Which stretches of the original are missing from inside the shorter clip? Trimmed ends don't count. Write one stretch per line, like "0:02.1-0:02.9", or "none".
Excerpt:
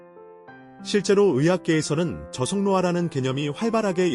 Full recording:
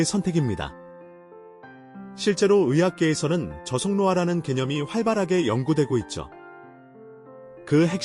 0:02.1-0:02.2